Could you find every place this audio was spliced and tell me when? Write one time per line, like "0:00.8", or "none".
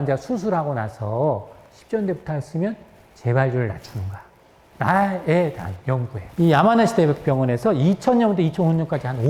0:06.2